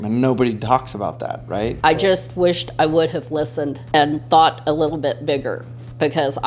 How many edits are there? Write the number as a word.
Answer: two